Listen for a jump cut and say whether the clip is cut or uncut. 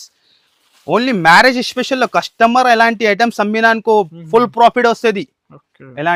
uncut